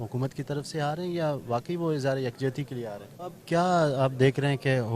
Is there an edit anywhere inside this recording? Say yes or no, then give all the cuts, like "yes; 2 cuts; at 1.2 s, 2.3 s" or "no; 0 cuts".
yes; 1 cut; at 3.1 s